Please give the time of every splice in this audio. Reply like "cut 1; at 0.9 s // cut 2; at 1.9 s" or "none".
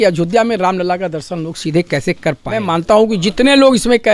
cut 1; at 2.6 s